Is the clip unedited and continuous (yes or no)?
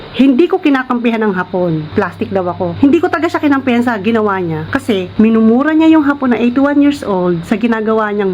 no